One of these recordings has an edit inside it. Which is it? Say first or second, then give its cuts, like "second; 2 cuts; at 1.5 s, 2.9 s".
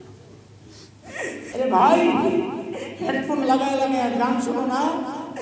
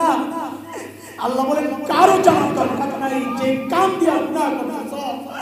first; 1 cut; at 1.5 s